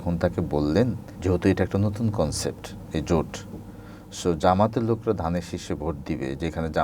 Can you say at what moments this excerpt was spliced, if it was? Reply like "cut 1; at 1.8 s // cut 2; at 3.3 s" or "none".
cut 1; at 1.1 s